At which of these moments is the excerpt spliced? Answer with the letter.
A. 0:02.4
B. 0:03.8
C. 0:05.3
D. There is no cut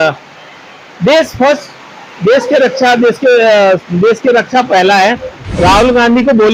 C